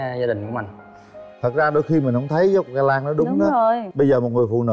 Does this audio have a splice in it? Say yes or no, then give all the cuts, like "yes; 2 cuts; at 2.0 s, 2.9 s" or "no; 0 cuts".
no; 0 cuts